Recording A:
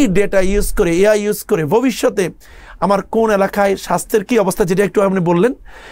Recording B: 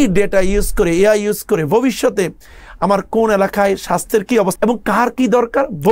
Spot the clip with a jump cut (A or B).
B